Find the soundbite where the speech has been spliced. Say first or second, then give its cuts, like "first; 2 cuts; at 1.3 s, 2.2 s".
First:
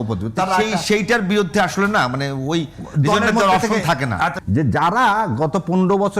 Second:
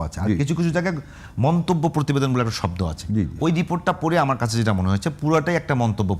first; 1 cut; at 4.4 s